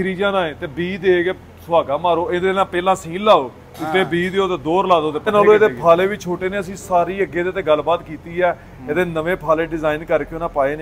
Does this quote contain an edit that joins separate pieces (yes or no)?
yes